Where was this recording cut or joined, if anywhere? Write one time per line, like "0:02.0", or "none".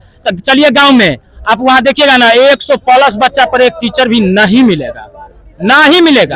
none